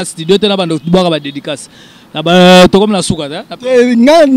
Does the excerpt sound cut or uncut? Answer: uncut